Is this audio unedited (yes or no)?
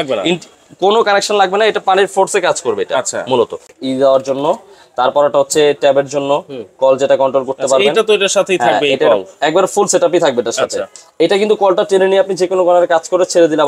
no